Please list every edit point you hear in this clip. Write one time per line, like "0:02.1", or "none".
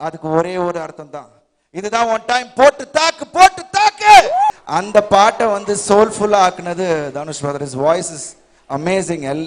0:04.5